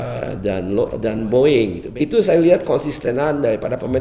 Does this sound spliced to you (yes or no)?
yes